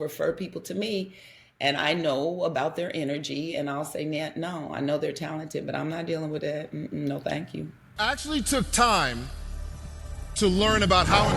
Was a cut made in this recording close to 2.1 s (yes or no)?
no